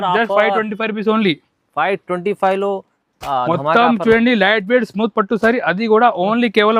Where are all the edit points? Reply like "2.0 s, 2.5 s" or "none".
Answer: none